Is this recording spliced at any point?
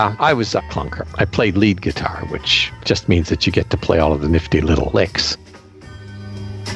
no; 0 cuts

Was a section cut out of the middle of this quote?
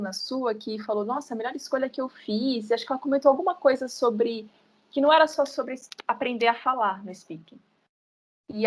no; 0 cuts

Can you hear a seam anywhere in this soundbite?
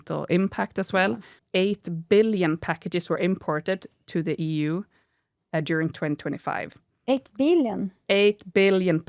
yes; 1 cut; at 1.4 s

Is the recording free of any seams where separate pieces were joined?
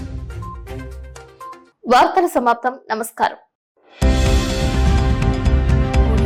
yes; 0 cuts

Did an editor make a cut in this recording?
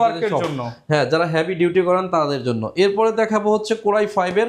no; 0 cuts

